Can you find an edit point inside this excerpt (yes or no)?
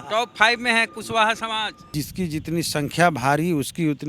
yes